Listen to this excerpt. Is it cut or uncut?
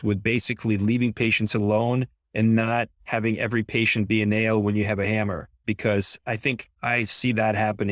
cut